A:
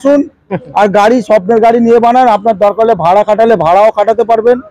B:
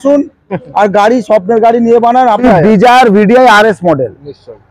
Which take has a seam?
B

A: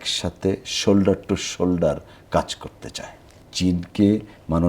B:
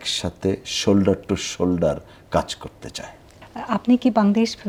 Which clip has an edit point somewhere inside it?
A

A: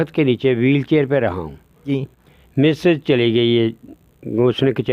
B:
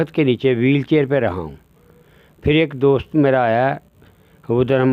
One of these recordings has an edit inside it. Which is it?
A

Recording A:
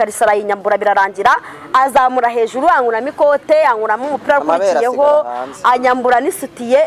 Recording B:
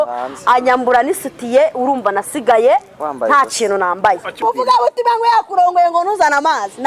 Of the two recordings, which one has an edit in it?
B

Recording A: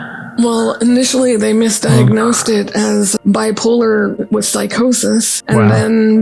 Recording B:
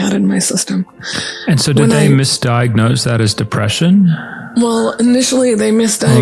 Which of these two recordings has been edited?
A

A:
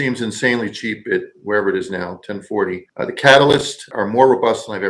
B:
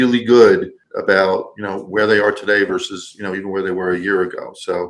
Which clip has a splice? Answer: A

